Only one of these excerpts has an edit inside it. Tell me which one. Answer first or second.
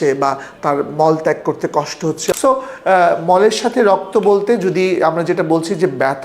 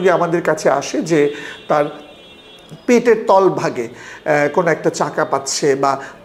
first